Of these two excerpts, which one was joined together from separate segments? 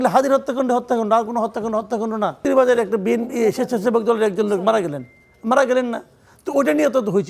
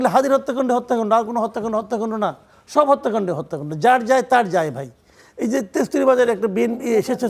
first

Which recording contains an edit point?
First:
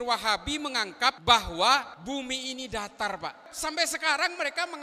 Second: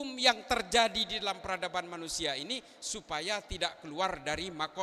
first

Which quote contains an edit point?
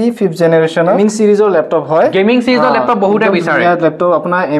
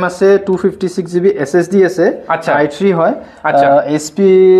first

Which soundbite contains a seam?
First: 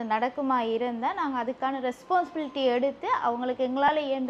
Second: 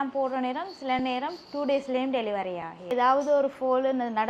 second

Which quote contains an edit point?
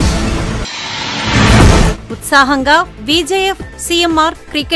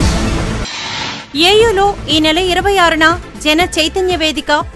second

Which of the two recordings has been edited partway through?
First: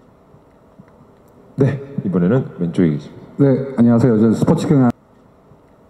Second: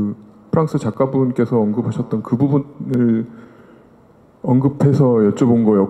first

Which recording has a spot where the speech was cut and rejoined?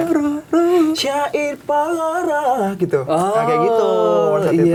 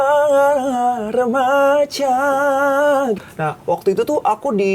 second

